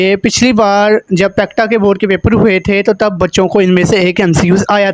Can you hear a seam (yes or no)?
no